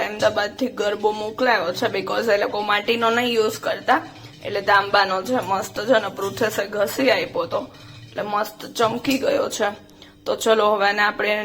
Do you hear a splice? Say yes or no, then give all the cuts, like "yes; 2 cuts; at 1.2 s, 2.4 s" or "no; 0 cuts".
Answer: no; 0 cuts